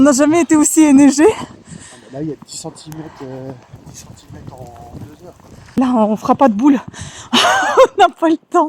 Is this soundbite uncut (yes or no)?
no